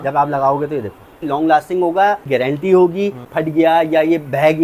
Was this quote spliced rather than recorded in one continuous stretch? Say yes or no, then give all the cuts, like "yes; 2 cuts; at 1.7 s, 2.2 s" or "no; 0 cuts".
yes; 3 cuts; at 1.2 s, 2.3 s, 3.3 s